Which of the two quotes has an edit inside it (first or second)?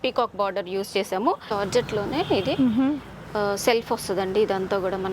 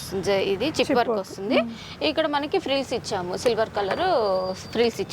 first